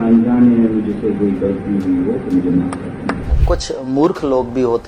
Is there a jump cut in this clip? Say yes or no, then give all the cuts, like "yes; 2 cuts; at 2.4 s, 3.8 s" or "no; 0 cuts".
yes; 1 cut; at 3.3 s